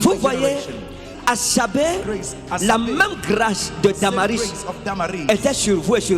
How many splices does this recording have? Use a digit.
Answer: 1